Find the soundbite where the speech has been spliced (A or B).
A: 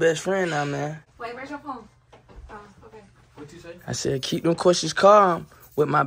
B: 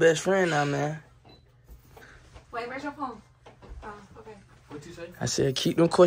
A